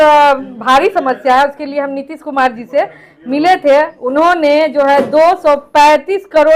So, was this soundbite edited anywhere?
no; 0 cuts

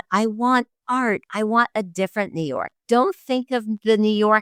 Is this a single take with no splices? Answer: yes; 0 cuts

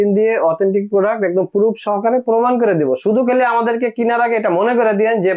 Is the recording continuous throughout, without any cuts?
yes; 0 cuts

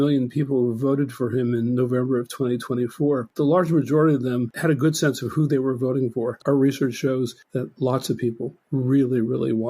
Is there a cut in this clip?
yes; 3 cuts; at 3.3 s, 4.5 s, 6.4 s

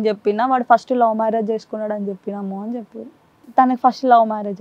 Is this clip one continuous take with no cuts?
no; 1 cut; at 3.4 s

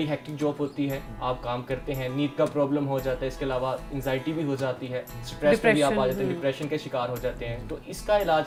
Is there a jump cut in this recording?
no; 0 cuts

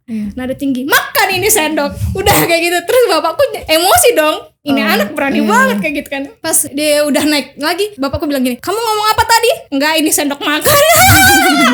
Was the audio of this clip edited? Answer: no; 0 cuts

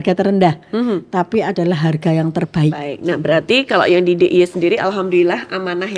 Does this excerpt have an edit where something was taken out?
yes; 1 cut; at 2.9 s

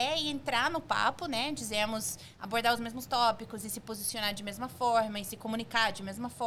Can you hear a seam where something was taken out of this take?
no; 0 cuts

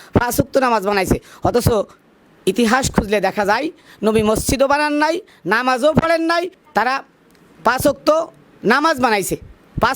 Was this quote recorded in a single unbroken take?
no; 1 cut; at 6.6 s

